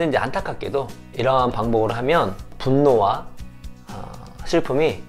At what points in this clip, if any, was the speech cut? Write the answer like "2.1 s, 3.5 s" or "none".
1.0 s, 2.5 s